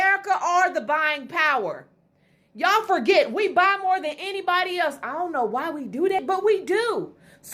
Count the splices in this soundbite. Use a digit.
1